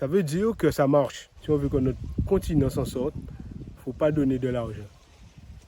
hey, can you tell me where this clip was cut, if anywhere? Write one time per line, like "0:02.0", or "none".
0:01.3